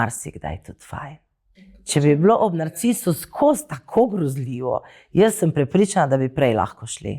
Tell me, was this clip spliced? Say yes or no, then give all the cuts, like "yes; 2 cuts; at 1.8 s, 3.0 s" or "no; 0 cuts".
yes; 1 cut; at 1.9 s